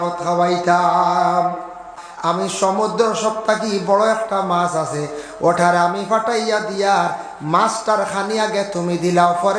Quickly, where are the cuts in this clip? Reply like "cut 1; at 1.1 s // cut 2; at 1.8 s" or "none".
cut 1; at 2.0 s